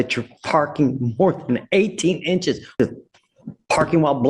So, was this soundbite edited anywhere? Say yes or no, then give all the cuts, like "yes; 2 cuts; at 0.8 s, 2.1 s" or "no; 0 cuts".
yes; 1 cut; at 2.7 s